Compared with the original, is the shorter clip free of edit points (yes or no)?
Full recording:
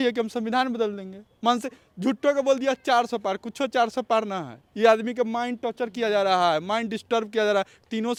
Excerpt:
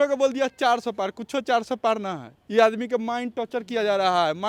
yes